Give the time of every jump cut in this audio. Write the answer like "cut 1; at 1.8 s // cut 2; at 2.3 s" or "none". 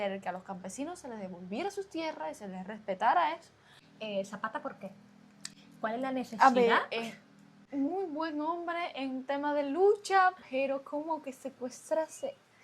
cut 1; at 3.9 s // cut 2; at 7.6 s